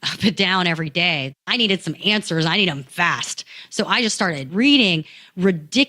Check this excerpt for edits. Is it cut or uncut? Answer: cut